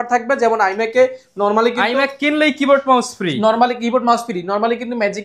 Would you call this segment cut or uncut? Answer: uncut